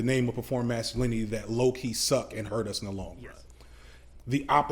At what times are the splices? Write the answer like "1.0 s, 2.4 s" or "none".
3.8 s